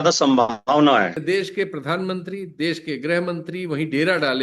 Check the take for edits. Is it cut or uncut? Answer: cut